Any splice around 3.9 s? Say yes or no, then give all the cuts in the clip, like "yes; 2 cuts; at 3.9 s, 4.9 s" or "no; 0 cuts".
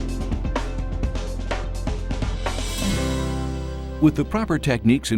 yes; 1 cut; at 3.9 s